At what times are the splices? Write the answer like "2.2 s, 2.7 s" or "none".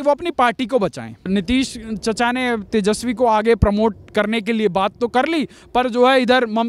1.1 s